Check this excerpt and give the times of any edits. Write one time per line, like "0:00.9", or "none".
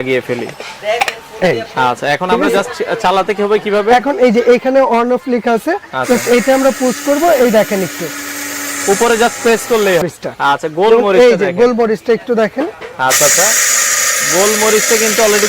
0:10.0